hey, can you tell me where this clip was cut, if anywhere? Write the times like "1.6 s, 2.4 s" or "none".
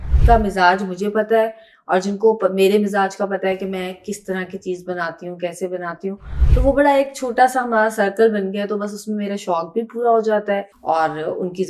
10.7 s

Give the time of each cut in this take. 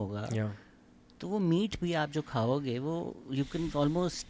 none

